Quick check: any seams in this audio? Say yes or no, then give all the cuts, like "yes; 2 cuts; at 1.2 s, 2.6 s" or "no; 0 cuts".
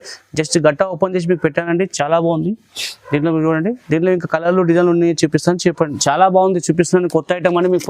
yes; 1 cut; at 6.0 s